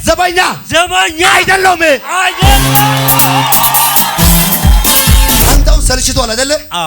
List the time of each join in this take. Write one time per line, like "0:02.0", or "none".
0:05.4